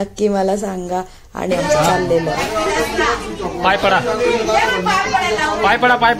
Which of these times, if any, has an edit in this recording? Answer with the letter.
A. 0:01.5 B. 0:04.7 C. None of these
A